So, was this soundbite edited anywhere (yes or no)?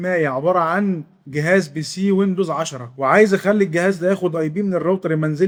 no